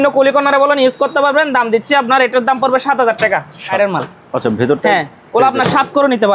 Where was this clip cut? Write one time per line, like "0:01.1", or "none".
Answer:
0:03.7